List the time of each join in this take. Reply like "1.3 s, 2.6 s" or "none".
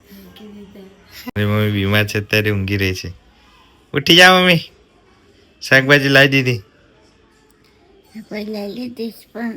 1.3 s